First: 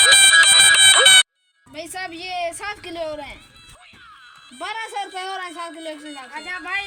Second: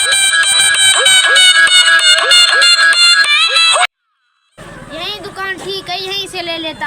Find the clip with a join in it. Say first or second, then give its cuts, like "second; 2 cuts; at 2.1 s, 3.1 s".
second; 1 cut; at 1.2 s